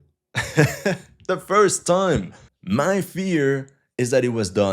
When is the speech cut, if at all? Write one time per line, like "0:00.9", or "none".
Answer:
0:02.4